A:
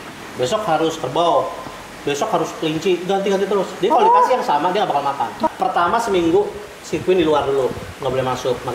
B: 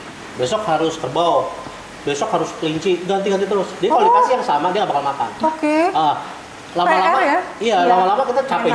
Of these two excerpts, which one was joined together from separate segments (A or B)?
A